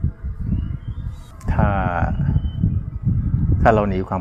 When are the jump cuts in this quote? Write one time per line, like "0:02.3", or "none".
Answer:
0:01.3